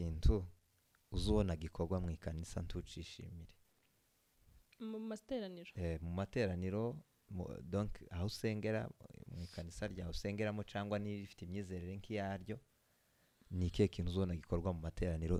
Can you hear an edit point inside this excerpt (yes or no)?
no